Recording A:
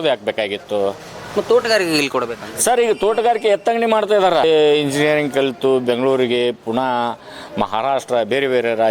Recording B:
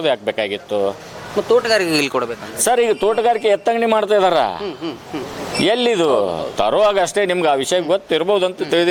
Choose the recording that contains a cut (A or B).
A